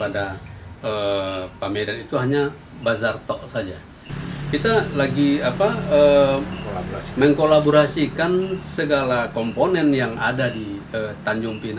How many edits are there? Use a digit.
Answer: 1